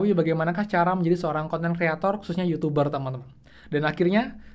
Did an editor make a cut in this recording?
no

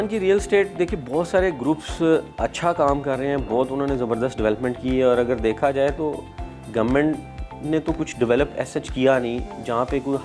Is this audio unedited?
yes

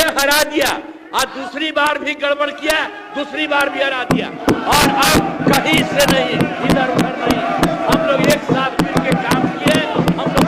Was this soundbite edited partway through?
no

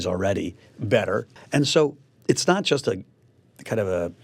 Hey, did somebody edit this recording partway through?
no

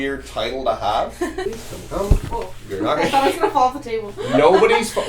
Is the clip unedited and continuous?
no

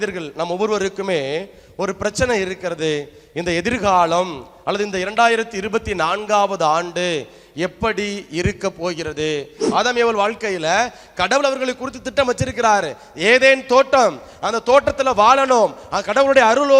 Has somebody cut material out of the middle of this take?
yes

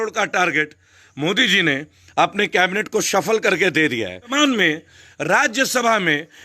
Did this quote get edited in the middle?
yes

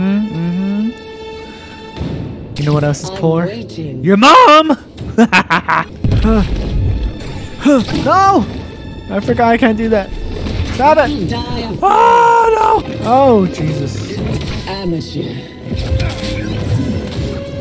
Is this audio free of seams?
no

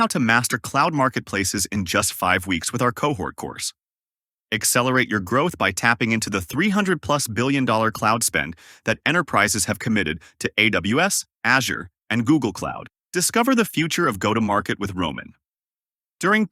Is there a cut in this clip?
no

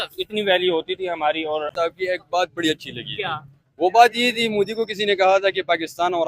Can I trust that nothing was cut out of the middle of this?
no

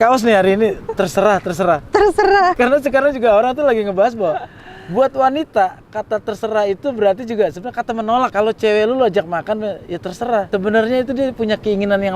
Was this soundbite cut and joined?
yes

